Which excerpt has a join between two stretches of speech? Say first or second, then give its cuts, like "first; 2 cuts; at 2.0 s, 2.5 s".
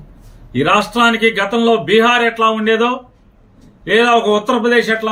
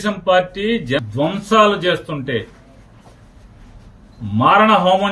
second; 1 cut; at 1.1 s